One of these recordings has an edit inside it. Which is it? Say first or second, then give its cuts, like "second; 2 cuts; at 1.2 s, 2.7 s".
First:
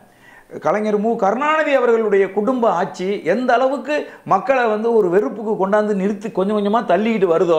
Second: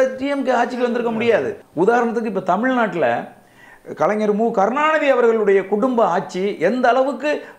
second; 1 cut; at 1.6 s